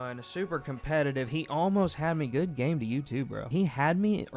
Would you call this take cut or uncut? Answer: cut